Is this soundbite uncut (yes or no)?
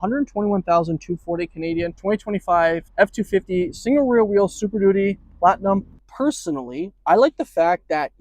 no